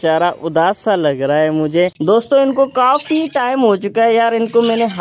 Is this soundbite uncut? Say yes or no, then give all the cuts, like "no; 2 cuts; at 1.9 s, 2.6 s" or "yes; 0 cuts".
no; 1 cut; at 2.1 s